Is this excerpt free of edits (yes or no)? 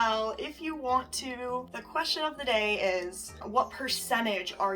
no